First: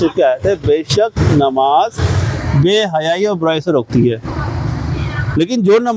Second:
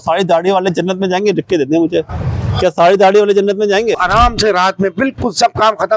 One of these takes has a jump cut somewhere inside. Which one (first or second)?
second